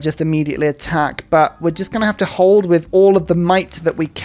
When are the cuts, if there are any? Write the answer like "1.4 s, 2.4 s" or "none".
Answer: none